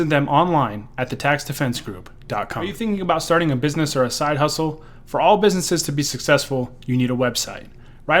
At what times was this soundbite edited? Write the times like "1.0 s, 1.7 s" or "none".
2.7 s